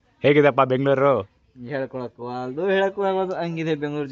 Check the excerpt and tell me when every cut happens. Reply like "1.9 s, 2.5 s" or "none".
none